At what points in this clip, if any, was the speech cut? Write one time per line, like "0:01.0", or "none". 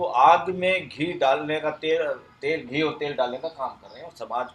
none